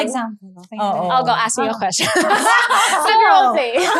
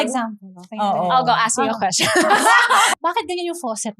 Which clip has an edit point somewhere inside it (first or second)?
second